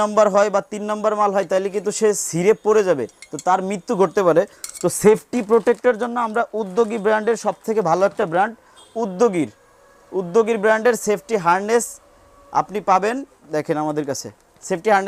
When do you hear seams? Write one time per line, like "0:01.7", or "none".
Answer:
none